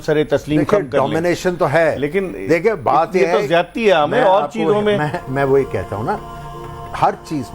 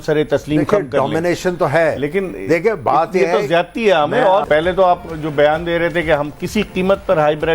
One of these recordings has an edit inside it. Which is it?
second; 1 cut; at 4.4 s

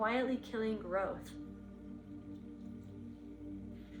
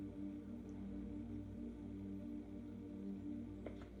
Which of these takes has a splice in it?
first; 1 cut; at 1.2 s

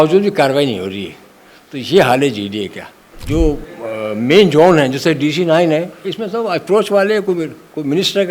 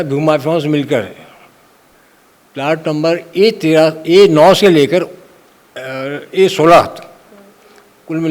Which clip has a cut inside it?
first; 1 cut; at 3.1 s

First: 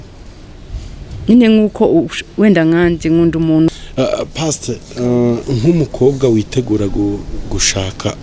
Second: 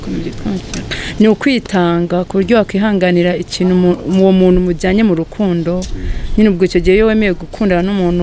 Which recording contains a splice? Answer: first; 1 cut; at 3.8 s

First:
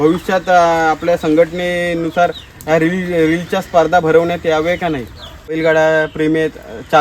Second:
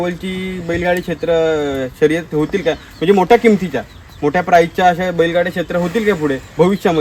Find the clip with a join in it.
first; 1 cut; at 5.6 s

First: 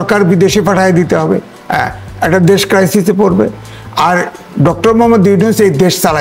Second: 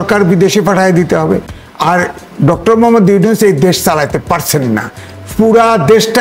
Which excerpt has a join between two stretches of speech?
second; 1 cut; at 1.6 s

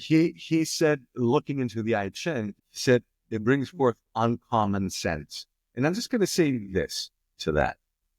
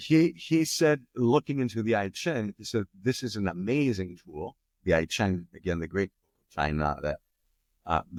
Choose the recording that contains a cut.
first; 1 cut; at 2.6 s

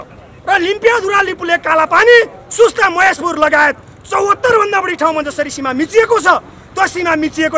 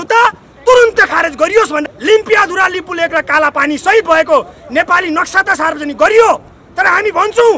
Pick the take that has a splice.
second; 1 cut; at 1.8 s

